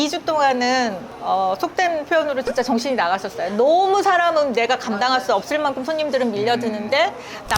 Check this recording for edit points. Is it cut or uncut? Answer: uncut